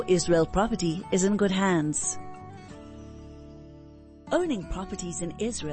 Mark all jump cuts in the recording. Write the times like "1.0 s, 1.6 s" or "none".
2.0 s, 4.2 s

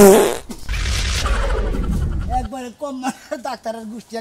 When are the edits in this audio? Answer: none

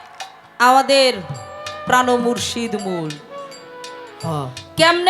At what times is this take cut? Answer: none

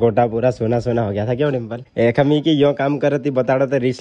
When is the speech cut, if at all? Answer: 1.8 s

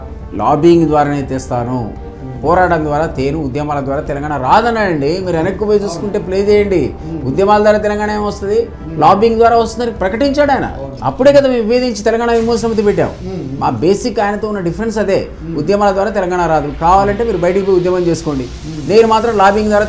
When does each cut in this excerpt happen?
none

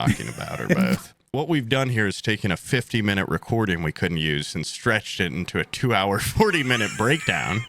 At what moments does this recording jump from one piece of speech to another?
1.1 s

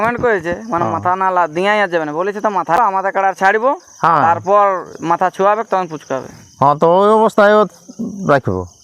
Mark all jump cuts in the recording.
2.8 s

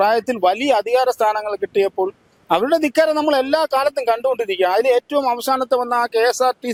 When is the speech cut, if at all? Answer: none

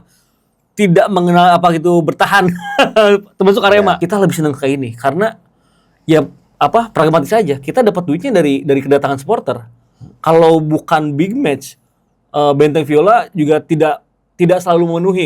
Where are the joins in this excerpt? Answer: 4.0 s

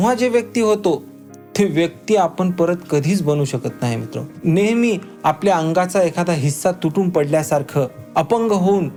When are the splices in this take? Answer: none

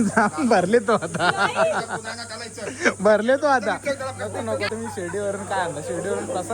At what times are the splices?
4.7 s

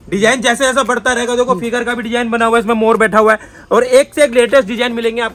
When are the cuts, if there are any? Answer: none

